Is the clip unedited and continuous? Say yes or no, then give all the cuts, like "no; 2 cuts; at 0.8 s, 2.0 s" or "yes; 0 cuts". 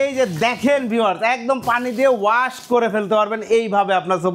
yes; 0 cuts